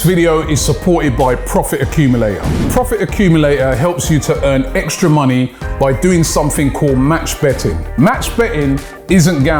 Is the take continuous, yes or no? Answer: yes